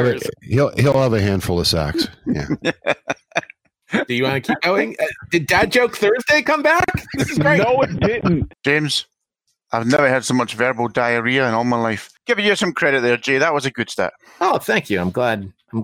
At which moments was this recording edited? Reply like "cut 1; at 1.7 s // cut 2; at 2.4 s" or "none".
cut 1; at 8.5 s // cut 2; at 12.1 s